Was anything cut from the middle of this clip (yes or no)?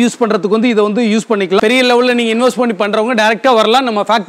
yes